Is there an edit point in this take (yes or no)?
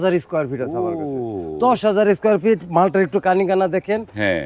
no